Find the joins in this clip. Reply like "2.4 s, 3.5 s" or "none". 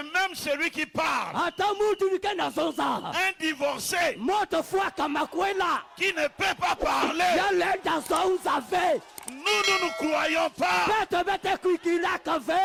none